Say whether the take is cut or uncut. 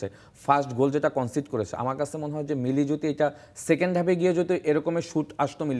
uncut